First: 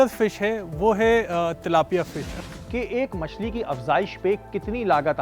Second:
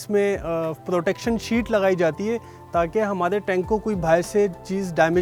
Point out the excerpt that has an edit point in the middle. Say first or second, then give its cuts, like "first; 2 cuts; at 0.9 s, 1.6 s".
first; 1 cut; at 2.4 s